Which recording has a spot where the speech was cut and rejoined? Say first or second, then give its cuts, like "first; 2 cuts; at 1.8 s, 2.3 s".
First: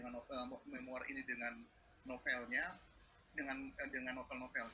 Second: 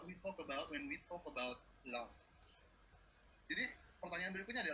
second; 1 cut; at 2.8 s